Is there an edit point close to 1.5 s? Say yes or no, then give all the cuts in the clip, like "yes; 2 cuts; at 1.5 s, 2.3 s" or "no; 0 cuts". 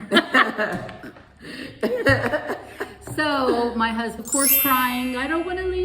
no; 1 cut; at 4.2 s